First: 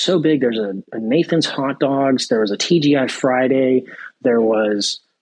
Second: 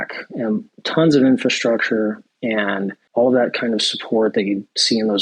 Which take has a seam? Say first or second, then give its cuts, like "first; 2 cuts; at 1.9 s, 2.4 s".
second; 1 cut; at 3.0 s